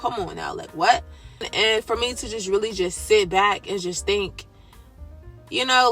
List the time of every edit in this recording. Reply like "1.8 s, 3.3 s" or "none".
1.5 s